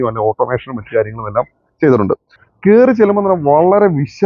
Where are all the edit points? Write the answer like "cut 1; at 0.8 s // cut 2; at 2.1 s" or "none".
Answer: cut 1; at 2.3 s